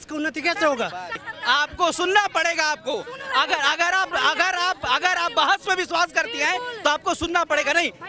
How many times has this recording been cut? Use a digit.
1